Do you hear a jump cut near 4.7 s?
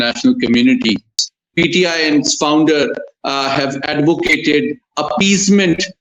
no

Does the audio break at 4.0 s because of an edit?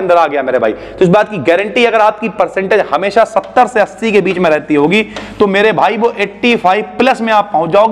no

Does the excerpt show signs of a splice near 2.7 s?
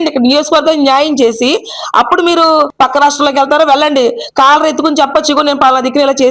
yes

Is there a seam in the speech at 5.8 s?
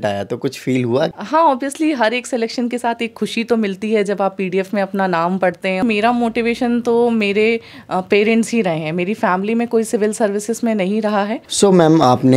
yes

